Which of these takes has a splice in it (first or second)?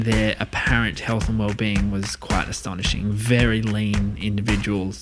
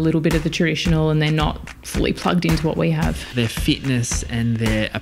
second